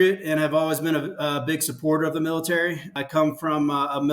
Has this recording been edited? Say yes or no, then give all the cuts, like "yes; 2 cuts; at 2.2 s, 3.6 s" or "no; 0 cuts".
yes; 1 cut; at 2.9 s